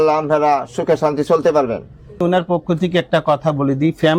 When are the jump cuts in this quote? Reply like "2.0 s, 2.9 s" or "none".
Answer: 2.2 s